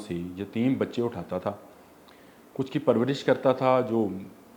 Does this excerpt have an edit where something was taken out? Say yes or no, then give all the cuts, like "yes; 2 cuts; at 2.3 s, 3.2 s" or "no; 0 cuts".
no; 0 cuts